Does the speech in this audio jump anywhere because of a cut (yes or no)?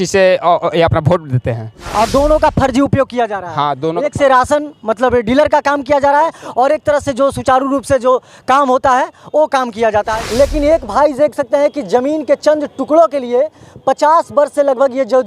yes